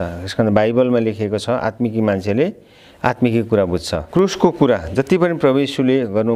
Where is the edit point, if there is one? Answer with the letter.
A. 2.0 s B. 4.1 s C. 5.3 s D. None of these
B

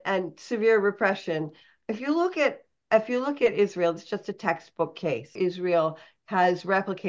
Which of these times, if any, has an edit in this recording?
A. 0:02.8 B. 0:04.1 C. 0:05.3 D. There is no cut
C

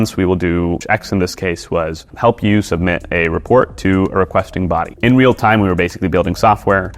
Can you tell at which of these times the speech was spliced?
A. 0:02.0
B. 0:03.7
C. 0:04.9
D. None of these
C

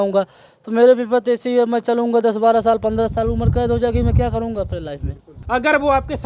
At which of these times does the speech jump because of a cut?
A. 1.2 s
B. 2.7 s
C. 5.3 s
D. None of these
C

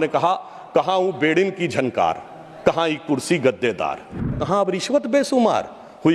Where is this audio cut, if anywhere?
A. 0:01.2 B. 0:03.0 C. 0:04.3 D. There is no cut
C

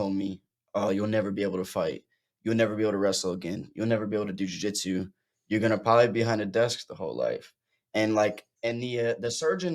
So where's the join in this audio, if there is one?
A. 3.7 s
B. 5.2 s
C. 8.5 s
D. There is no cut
C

